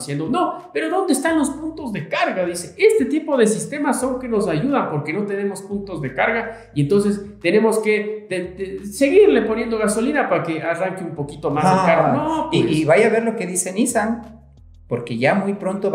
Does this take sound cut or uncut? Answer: uncut